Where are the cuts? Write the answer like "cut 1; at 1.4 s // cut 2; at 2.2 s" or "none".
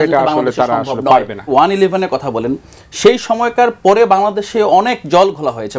cut 1; at 1.5 s